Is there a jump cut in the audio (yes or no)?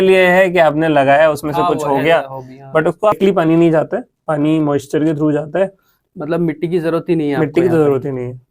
yes